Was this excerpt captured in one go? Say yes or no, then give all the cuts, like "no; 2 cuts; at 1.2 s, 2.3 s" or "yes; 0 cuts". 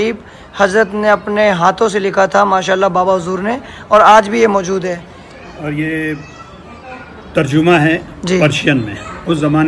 yes; 0 cuts